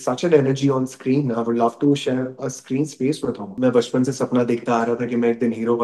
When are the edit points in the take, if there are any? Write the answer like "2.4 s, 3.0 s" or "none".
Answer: 3.5 s